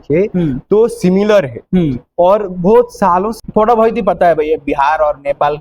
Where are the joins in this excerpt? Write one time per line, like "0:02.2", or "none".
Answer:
0:03.3